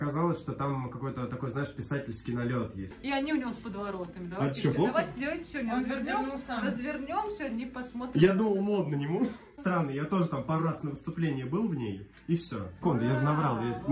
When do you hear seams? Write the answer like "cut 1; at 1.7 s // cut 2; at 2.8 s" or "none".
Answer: cut 1; at 2.9 s // cut 2; at 9.5 s // cut 3; at 12.8 s